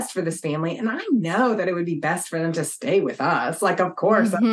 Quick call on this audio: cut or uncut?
uncut